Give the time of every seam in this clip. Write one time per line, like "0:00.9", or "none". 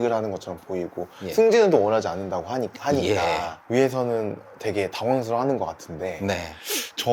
none